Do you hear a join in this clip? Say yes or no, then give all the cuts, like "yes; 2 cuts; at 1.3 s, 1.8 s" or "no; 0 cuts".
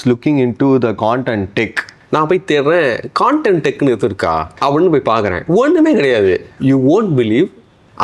yes; 3 cuts; at 1.9 s, 4.5 s, 6.5 s